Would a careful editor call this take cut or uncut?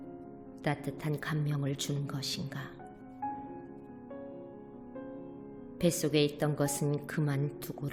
uncut